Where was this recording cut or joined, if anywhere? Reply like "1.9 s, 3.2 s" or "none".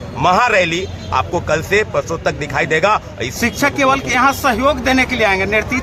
3.2 s